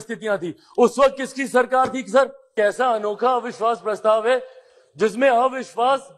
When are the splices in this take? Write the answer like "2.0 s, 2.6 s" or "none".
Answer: 2.5 s